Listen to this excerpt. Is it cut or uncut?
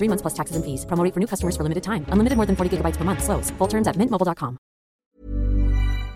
cut